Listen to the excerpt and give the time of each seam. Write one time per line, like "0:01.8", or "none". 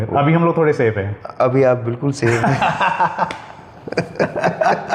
none